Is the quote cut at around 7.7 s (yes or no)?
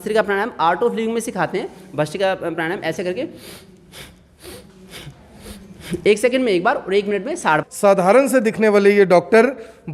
yes